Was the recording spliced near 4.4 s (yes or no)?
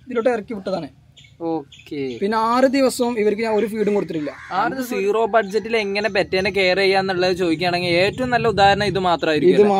yes